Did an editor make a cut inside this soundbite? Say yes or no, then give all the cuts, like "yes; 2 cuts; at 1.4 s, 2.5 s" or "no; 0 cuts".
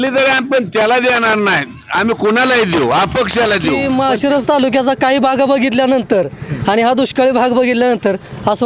yes; 1 cut; at 3.8 s